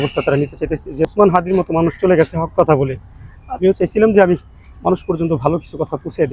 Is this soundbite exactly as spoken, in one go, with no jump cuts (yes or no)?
no